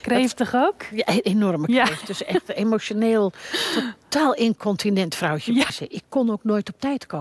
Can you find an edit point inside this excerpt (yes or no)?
yes